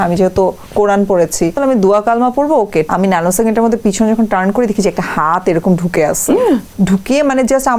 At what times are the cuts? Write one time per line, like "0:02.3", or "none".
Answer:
0:01.6
0:02.9
0:06.7